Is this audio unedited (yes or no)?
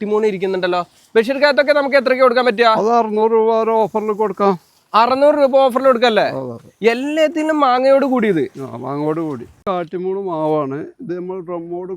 no